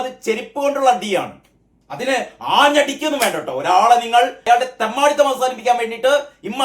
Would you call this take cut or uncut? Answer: cut